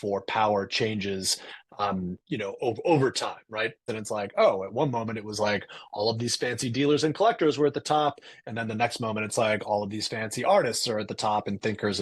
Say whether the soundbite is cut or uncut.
cut